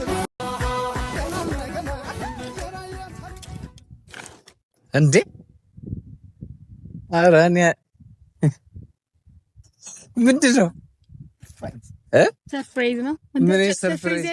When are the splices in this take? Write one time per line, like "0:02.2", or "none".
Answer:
none